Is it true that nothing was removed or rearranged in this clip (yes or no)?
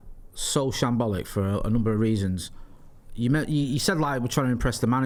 yes